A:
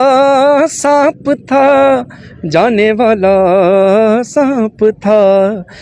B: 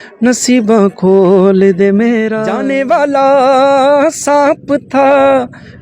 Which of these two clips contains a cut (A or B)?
B